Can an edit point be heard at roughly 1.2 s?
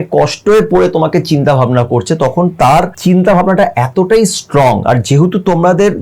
no; 1 cut; at 2.9 s

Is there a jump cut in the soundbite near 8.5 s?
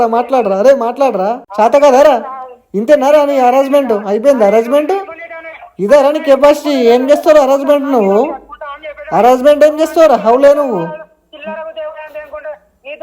no; 1 cut; at 1.4 s

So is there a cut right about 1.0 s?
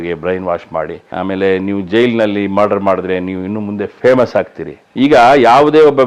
yes; 1 cut; at 1.0 s

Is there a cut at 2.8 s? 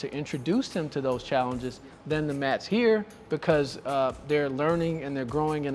no; 0 cuts

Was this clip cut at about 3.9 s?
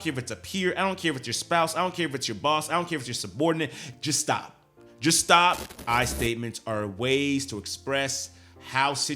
yes; 2 cuts; at 3.9 s, 5.7 s

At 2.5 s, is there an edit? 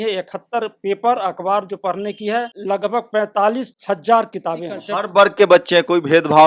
yes; 3 cuts; at 2.5 s, 3.7 s, 4.8 s

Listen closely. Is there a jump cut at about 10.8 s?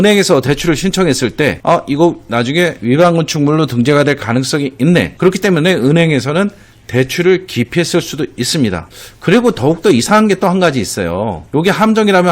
no; 3 cuts; at 1.6 s, 5.1 s, 8.8 s

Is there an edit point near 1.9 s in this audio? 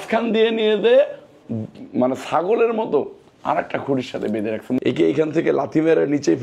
no; 1 cut; at 4.7 s

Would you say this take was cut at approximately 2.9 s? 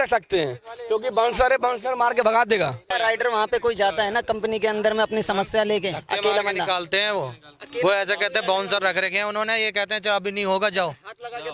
yes; 1 cut; at 2.9 s

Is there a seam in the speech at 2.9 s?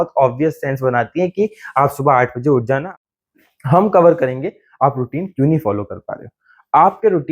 yes; 1 cut; at 2.9 s

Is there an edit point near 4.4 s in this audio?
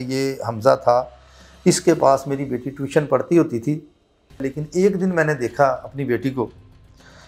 yes; 1 cut; at 4.4 s

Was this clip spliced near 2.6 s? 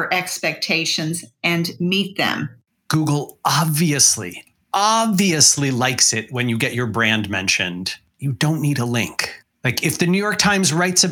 yes; 1 cut; at 2.6 s

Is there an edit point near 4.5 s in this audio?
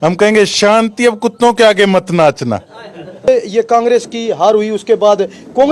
no; 1 cut; at 3.3 s

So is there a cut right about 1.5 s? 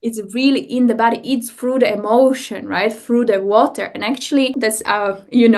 no; 1 cut; at 4.6 s

